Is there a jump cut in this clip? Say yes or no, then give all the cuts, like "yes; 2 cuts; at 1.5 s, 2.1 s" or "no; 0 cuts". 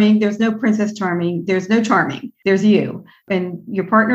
yes; 2 cuts; at 2.2 s, 3.2 s